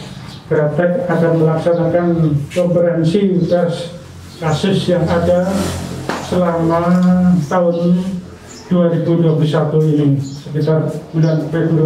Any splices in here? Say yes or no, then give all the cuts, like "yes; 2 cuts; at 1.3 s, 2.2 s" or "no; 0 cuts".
no; 0 cuts